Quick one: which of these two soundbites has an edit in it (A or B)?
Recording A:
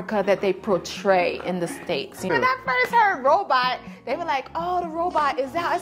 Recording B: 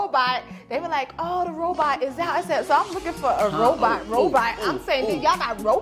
A